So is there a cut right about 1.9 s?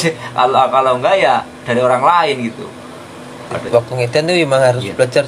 no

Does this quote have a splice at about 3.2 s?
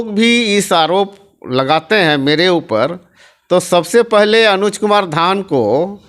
no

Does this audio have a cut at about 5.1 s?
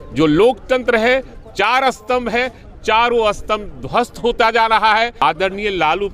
yes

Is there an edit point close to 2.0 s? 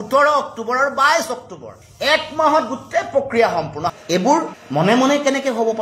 no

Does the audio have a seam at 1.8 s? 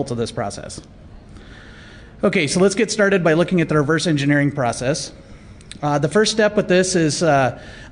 yes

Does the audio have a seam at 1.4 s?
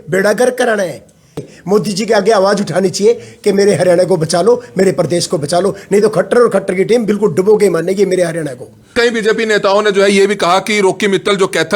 yes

